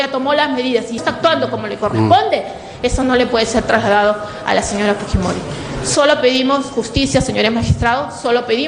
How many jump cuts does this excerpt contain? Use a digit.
1